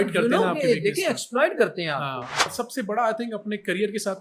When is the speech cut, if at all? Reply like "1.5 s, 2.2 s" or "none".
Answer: 2.5 s